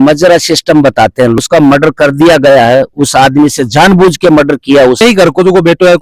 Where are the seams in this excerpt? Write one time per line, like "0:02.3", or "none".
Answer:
0:01.4
0:05.0